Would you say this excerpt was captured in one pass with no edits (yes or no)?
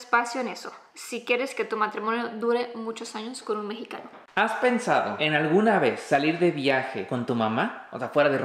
no